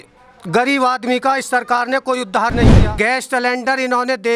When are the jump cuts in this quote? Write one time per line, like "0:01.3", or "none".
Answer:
0:02.8